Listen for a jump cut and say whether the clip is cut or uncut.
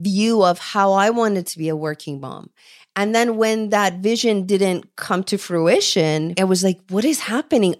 cut